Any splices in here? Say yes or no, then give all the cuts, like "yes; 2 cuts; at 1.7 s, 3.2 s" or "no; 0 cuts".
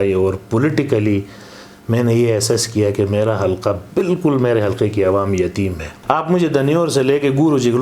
yes; 1 cut; at 5.9 s